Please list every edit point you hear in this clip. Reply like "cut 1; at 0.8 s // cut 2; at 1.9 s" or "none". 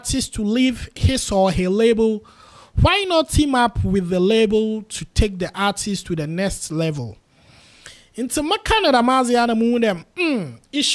none